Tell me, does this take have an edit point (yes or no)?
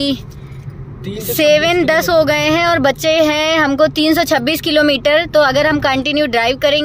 no